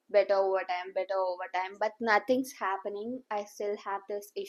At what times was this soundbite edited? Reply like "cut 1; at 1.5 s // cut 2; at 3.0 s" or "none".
none